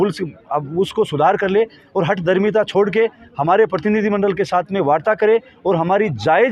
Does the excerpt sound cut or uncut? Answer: uncut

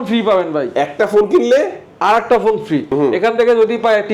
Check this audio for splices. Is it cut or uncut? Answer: cut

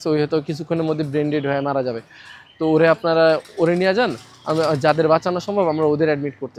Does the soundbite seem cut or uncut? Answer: uncut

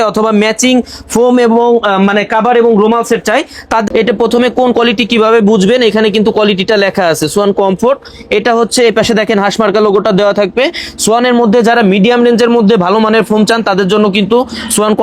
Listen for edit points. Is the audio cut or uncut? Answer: cut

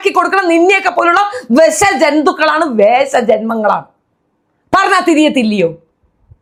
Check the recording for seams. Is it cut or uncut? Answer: uncut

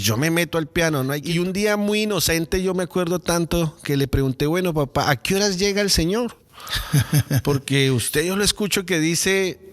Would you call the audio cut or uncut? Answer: cut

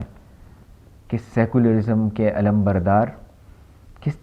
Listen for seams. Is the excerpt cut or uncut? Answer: uncut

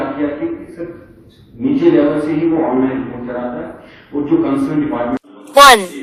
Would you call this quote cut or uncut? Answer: uncut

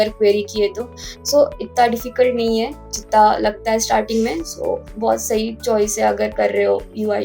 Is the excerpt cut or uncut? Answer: cut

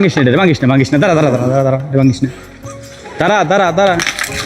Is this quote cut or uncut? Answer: uncut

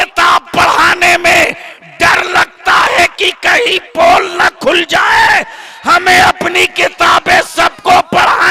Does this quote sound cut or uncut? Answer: uncut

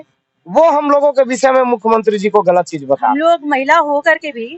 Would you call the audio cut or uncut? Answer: cut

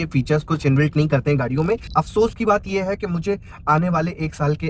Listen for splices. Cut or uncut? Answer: cut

